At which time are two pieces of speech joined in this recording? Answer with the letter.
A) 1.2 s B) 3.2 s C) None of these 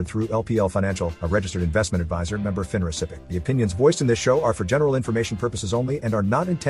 B